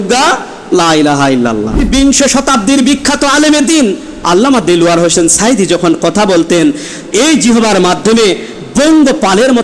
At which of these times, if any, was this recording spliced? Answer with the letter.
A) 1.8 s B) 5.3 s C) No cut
A